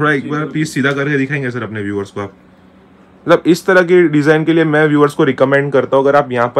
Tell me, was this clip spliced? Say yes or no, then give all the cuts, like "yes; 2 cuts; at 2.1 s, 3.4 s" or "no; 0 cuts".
no; 0 cuts